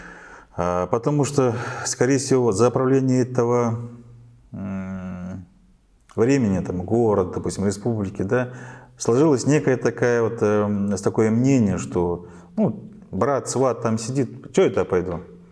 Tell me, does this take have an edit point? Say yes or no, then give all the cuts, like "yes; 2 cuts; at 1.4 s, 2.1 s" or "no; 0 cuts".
no; 0 cuts